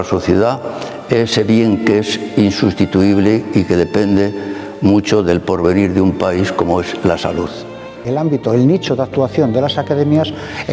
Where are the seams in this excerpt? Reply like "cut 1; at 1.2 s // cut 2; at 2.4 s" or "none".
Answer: none